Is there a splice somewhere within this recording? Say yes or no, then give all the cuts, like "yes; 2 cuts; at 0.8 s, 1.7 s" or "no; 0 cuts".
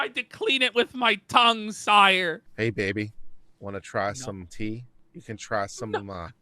yes; 1 cut; at 2.4 s